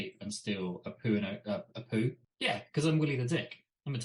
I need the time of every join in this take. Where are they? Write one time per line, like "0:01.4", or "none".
0:02.2